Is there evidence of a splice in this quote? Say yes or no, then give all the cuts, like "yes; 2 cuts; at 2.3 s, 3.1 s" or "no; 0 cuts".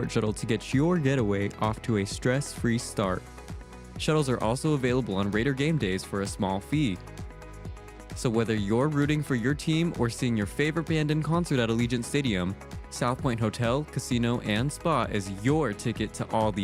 no; 0 cuts